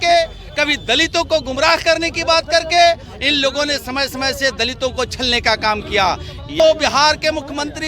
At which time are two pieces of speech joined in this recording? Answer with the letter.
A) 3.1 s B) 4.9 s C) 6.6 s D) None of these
C